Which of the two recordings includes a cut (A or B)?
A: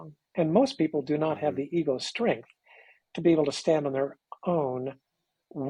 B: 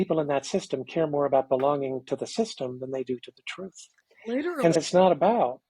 B